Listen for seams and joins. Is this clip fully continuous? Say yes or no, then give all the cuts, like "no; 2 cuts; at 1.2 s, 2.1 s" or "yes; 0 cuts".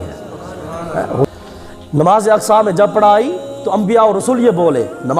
no; 1 cut; at 1.2 s